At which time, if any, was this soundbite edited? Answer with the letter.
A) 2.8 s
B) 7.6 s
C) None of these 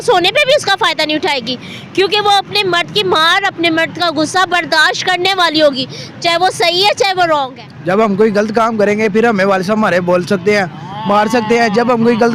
B